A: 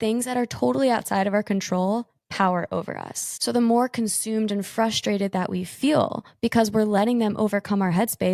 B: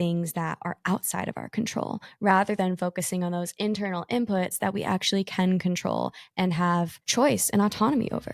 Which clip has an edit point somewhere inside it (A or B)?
B